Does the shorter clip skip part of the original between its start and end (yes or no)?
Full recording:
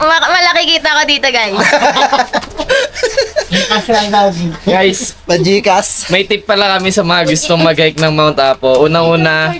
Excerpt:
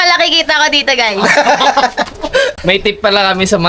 yes